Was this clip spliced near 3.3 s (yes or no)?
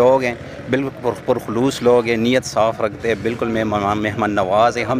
no